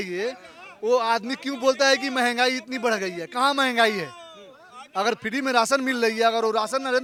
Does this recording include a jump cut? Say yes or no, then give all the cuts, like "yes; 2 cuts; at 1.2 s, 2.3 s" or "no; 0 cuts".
no; 0 cuts